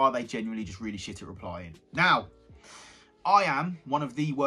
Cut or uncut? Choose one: uncut